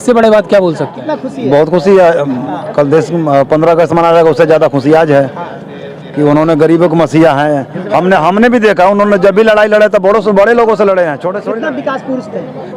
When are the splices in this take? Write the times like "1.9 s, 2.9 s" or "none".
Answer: 1.0 s, 11.3 s